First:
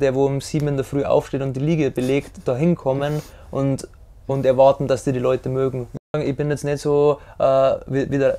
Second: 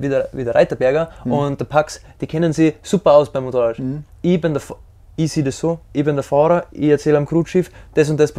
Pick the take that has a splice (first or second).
first